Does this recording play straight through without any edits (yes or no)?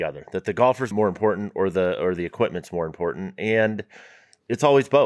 no